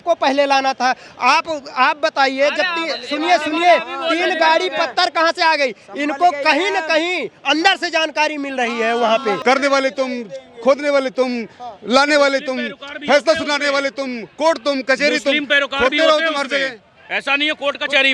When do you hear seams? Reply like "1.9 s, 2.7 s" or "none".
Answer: 9.4 s